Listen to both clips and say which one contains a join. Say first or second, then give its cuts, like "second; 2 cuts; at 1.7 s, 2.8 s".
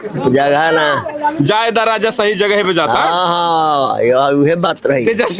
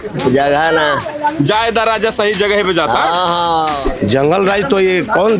second; 1 cut; at 3.8 s